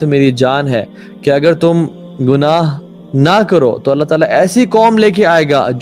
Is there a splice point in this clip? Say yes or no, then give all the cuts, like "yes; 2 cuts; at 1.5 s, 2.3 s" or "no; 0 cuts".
no; 0 cuts